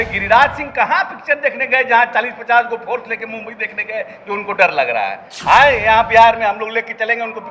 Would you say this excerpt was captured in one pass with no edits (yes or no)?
yes